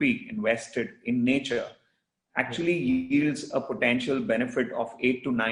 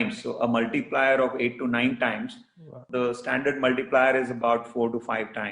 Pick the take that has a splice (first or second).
second